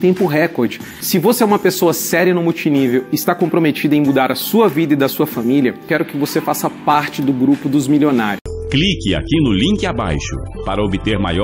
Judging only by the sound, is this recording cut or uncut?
cut